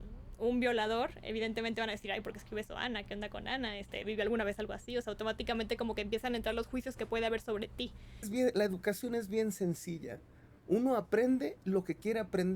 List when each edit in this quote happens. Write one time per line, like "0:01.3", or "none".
0:08.3